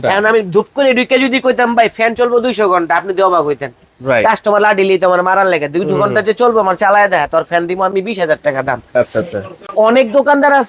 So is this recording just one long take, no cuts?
yes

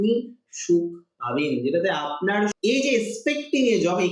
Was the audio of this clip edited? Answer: yes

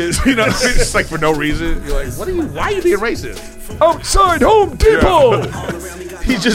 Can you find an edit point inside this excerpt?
no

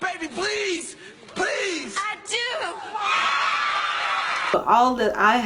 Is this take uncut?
no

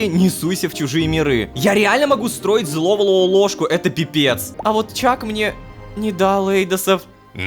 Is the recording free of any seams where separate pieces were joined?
no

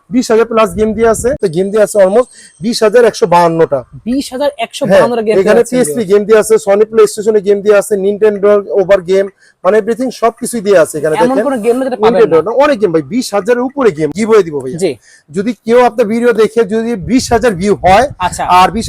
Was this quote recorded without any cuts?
no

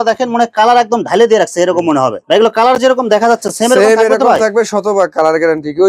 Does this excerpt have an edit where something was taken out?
no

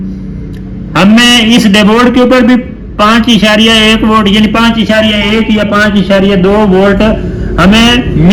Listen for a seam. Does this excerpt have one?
no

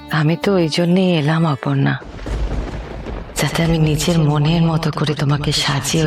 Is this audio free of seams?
yes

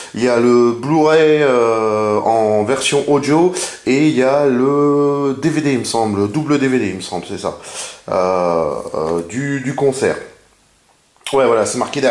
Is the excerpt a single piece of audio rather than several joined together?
no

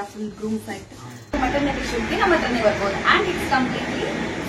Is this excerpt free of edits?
no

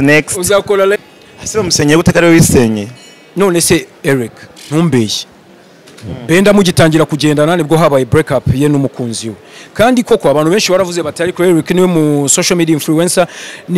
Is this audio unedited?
no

